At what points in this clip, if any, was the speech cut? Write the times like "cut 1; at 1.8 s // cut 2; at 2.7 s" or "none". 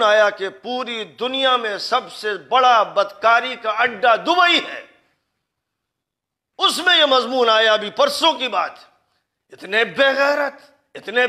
none